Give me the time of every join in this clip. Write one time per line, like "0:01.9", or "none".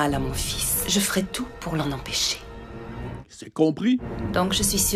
none